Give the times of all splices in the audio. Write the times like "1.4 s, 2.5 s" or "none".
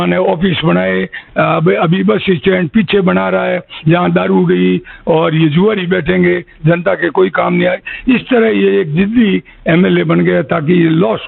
none